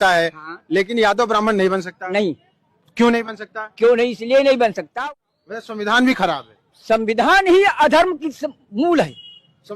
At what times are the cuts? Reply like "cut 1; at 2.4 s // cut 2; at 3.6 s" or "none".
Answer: cut 1; at 4.8 s